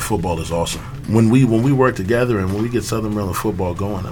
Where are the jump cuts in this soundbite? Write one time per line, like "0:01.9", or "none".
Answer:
0:01.0